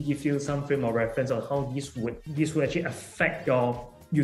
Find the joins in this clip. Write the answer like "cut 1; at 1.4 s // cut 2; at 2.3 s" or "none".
cut 1; at 2.2 s // cut 2; at 3.4 s

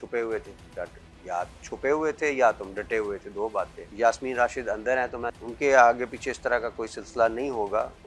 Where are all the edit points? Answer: cut 1; at 3.8 s // cut 2; at 5.4 s

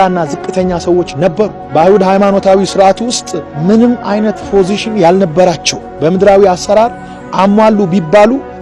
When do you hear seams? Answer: none

